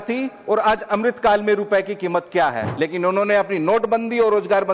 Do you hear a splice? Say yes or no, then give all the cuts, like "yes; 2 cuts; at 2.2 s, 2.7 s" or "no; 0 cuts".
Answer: yes; 1 cut; at 2.6 s